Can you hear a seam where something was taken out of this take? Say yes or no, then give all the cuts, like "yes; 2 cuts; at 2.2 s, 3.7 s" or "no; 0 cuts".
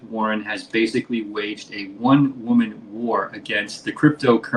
no; 0 cuts